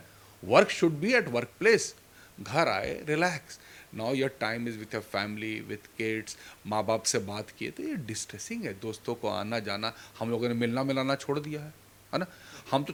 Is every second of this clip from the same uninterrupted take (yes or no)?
yes